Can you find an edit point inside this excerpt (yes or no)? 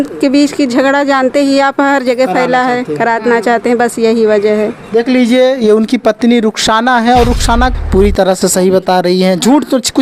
yes